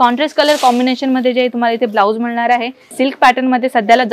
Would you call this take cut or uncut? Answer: cut